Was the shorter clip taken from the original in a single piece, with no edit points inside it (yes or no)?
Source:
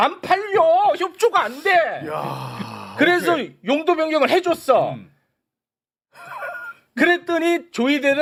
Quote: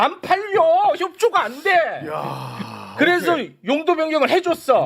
yes